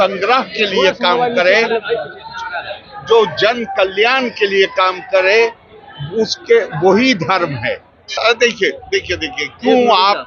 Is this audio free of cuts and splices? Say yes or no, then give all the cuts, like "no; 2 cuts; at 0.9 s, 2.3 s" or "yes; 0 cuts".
no; 1 cut; at 8.2 s